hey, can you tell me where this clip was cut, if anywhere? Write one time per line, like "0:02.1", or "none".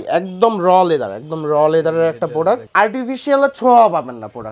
0:02.7